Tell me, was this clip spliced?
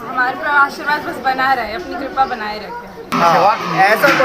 yes; 1 cut; at 3.1 s

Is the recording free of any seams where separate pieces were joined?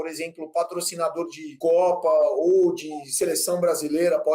no; 1 cut; at 1.4 s

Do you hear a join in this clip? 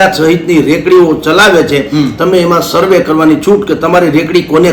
no; 0 cuts

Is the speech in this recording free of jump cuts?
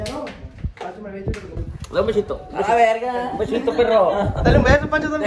no; 1 cut; at 1.7 s

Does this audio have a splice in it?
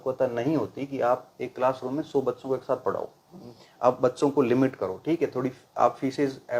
no; 0 cuts

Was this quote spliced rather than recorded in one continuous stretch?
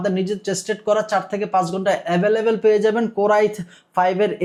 no; 0 cuts

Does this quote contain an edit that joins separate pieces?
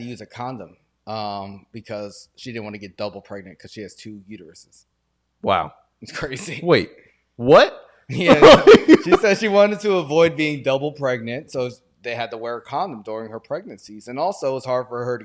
no; 0 cuts

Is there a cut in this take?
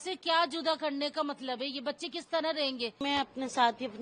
yes; 1 cut; at 3.0 s

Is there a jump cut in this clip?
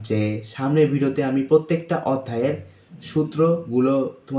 no; 0 cuts

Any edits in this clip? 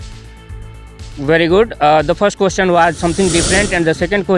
yes; 1 cut; at 1.1 s

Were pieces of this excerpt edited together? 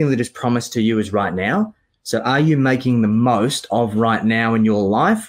no; 0 cuts

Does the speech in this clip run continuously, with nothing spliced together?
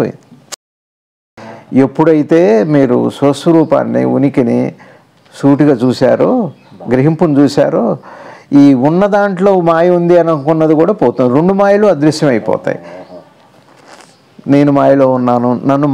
no; 1 cut; at 1.0 s

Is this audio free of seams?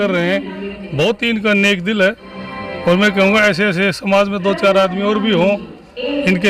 yes; 0 cuts

